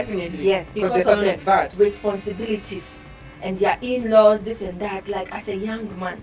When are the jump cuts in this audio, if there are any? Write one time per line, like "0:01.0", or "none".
none